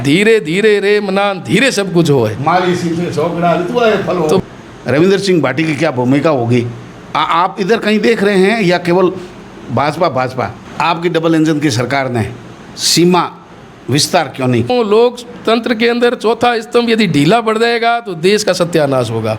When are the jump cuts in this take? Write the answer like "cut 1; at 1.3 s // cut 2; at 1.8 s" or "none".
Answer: cut 1; at 4.4 s // cut 2; at 10.6 s // cut 3; at 14.7 s